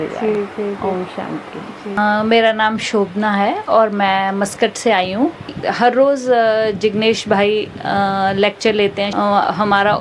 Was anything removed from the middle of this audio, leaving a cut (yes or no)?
yes